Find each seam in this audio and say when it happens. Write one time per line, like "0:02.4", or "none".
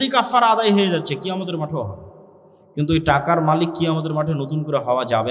none